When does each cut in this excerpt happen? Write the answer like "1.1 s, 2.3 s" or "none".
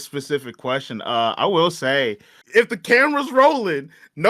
2.4 s